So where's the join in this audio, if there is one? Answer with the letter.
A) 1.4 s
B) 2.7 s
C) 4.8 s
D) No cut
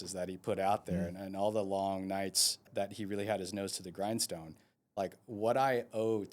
B